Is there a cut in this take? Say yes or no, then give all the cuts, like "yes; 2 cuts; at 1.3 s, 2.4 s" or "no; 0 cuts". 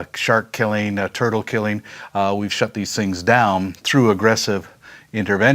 yes; 1 cut; at 2.2 s